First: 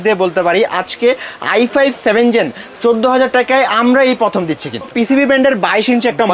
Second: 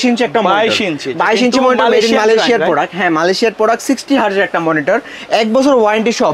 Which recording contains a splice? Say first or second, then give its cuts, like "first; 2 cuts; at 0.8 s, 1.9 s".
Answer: first; 1 cut; at 4.9 s